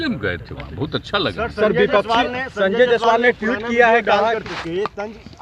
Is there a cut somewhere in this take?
no; 0 cuts

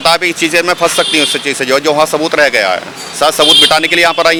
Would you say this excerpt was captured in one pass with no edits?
yes; 0 cuts

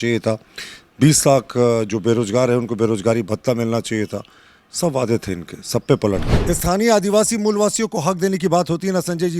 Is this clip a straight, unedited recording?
no; 1 cut; at 6.3 s

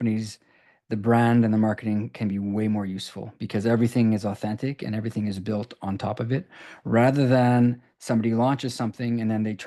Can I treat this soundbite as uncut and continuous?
yes; 0 cuts

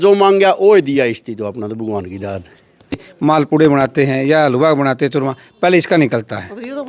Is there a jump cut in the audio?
yes; 1 cut; at 3.0 s

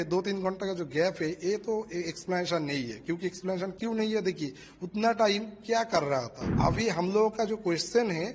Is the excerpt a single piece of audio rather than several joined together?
no; 1 cut; at 6.6 s

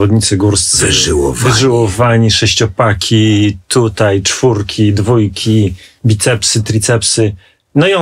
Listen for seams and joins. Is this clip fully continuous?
yes; 0 cuts

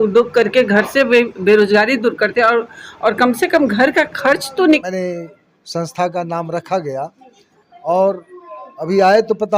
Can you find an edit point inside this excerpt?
yes; 1 cut; at 4.8 s

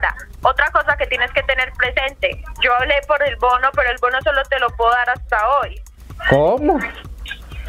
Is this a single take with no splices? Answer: yes; 0 cuts

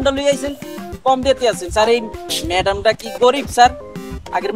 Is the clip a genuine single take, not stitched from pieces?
yes; 0 cuts

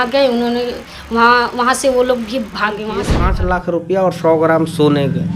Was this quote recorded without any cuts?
no; 1 cut; at 3.1 s

